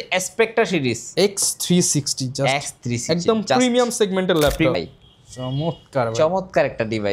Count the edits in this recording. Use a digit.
1